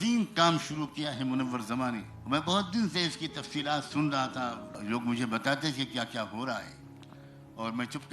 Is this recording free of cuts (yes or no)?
no